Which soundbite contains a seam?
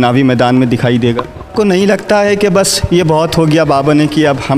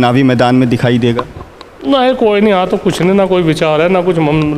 first; 1 cut; at 1.5 s

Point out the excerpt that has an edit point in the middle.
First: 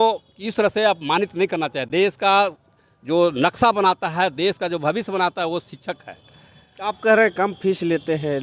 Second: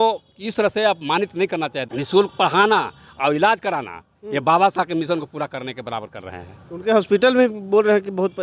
second; 1 cut; at 1.8 s

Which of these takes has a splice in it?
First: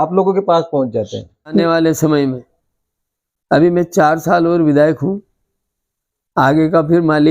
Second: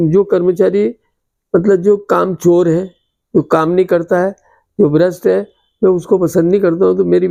first; 1 cut; at 1.6 s

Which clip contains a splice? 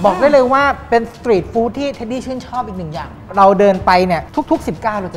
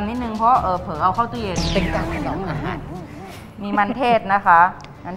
first; 2 cuts; at 3.2 s, 4.3 s

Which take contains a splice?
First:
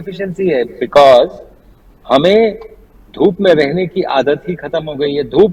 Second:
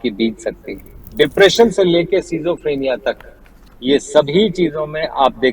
second; 1 cut; at 1.0 s

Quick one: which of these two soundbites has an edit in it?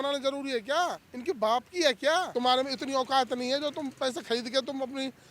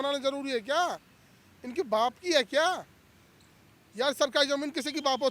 first; 2 cuts; at 1.1 s, 2.3 s

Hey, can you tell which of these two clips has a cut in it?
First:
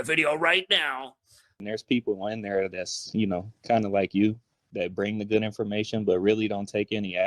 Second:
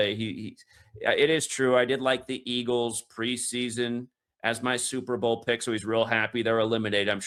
first; 1 cut; at 1.5 s

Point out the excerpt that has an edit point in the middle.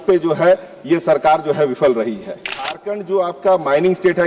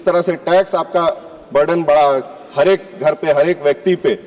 first; 1 cut; at 2.8 s

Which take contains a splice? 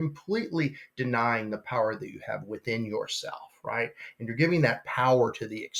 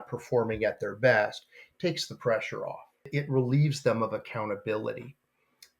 second; 1 cut; at 3.1 s

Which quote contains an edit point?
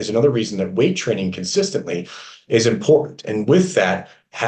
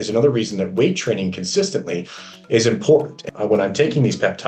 second; 1 cut; at 3.2 s

